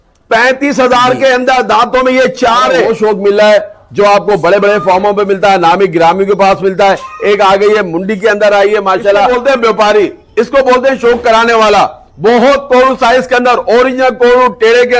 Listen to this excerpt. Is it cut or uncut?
cut